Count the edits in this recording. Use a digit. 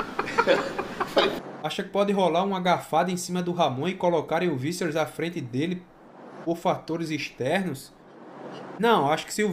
1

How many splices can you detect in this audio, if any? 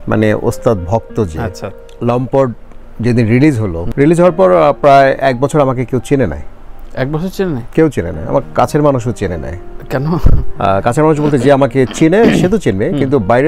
1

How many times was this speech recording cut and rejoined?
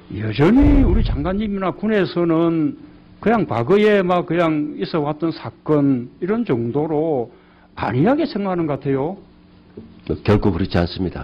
1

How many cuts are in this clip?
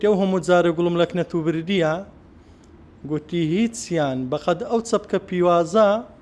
0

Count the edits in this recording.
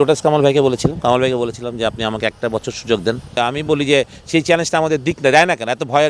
1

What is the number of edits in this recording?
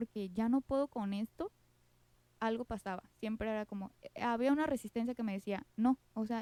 0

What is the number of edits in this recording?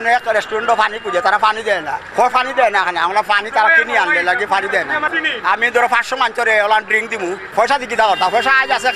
3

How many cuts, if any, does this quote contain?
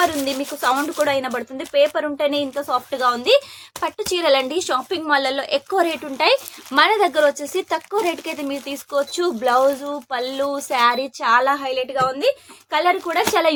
0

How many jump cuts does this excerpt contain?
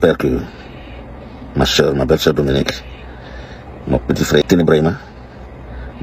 1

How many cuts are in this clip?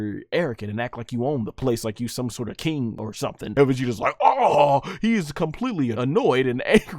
3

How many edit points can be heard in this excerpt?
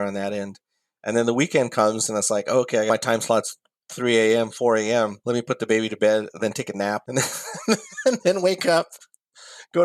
3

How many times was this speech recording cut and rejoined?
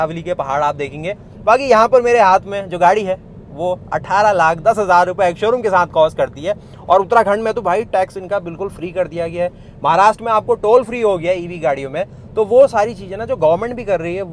0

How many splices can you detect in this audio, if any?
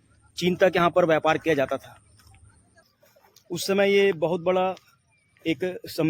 1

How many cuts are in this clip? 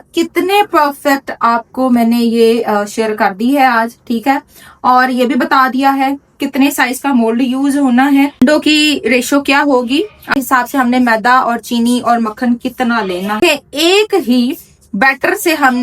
3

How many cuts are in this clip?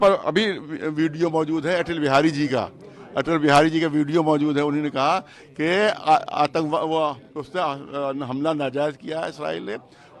0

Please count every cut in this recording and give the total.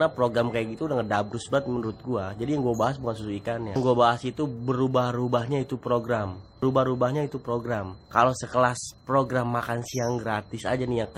0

